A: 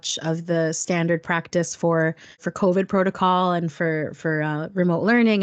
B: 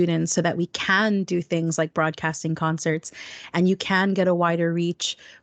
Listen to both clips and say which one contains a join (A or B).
A